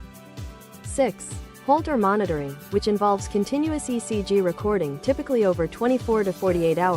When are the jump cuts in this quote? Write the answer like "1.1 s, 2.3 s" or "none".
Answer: 0.9 s